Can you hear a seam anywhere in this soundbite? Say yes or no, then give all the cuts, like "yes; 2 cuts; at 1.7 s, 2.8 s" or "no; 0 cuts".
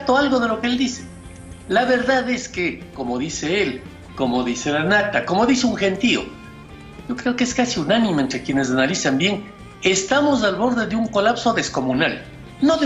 no; 0 cuts